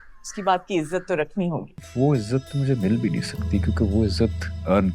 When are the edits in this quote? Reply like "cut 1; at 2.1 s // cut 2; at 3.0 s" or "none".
cut 1; at 1.8 s